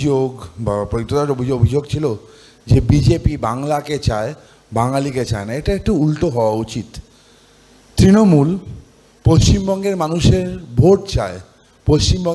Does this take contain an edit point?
no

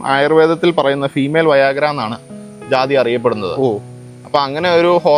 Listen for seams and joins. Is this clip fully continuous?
yes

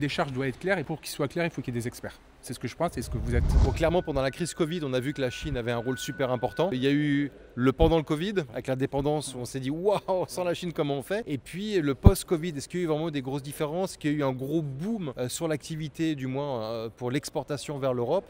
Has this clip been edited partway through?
no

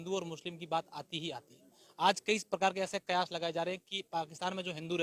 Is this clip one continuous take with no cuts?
yes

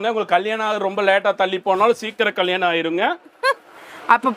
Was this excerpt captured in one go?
yes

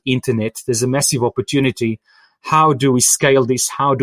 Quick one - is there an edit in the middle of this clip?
no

